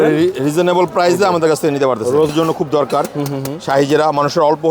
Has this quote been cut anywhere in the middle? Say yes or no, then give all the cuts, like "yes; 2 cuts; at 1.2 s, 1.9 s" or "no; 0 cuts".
yes; 1 cut; at 2.3 s